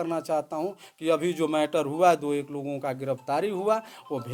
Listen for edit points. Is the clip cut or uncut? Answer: uncut